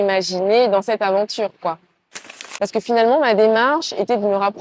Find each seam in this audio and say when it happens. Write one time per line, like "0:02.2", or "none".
0:02.2